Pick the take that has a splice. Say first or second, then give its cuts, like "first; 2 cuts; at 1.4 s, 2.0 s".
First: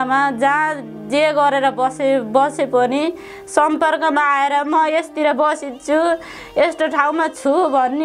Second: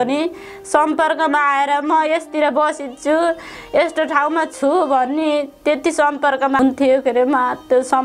second; 1 cut; at 6.6 s